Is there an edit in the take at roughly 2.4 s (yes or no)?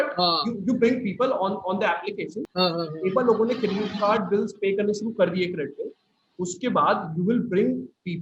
yes